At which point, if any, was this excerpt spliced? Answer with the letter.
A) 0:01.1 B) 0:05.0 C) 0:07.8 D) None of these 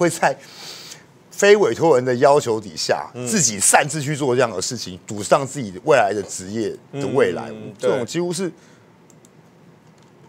D